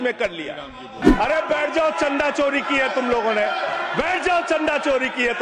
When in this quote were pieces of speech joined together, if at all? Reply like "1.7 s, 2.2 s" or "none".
1.0 s